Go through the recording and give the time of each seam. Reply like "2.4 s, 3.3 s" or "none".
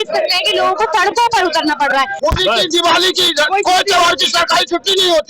2.1 s